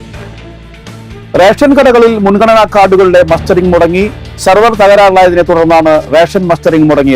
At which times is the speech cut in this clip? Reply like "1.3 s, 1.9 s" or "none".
1.0 s